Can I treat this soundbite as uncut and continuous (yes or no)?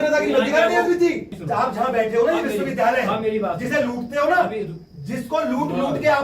no